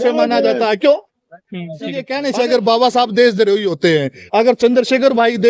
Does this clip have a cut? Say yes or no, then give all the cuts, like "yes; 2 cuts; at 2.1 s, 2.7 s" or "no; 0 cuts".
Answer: yes; 1 cut; at 2.1 s